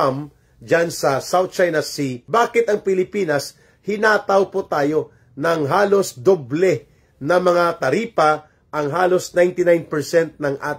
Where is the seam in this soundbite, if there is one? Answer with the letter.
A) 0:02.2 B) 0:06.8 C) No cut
A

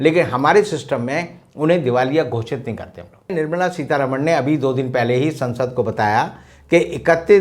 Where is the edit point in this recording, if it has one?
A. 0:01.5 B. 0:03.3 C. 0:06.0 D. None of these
B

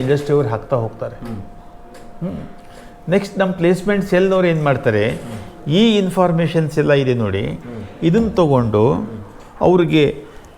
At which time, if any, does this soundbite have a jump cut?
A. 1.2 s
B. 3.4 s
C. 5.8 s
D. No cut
D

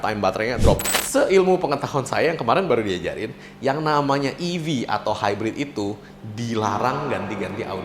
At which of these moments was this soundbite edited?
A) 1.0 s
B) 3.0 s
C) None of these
A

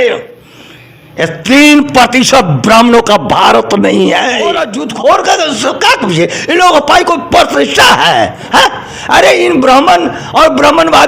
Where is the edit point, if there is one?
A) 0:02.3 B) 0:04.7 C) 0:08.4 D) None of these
B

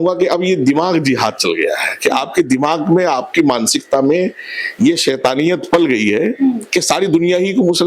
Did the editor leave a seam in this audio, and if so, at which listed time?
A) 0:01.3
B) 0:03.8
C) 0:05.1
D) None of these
D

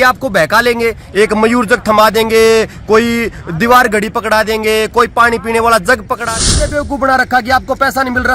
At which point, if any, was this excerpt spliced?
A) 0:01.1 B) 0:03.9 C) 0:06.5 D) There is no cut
C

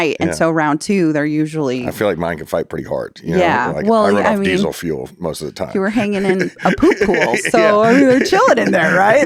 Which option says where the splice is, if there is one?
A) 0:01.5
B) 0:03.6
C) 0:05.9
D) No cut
D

